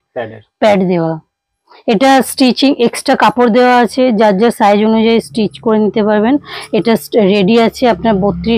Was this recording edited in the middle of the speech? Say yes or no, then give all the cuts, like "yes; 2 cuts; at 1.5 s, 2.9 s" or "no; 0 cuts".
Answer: no; 0 cuts